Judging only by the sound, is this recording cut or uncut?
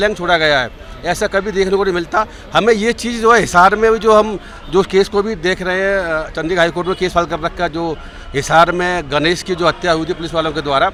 uncut